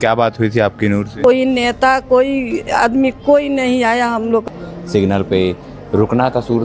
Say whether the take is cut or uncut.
cut